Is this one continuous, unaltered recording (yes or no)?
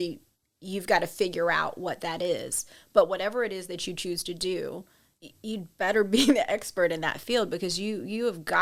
yes